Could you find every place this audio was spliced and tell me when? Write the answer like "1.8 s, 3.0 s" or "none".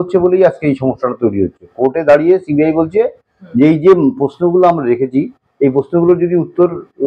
none